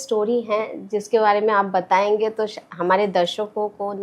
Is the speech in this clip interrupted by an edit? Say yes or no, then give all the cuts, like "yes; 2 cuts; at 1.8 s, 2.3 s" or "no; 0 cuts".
no; 0 cuts